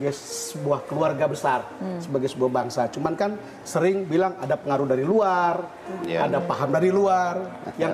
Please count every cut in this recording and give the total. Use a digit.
0